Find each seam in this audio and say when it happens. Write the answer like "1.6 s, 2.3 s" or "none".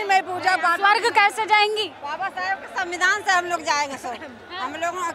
2.0 s